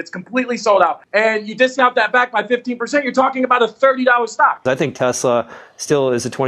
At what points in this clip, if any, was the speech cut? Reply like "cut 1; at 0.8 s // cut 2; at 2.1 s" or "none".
cut 1; at 1.0 s // cut 2; at 4.6 s